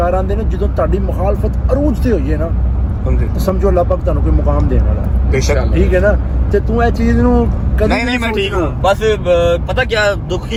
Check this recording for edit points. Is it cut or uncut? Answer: uncut